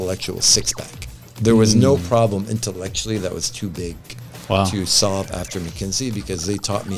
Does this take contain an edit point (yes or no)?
no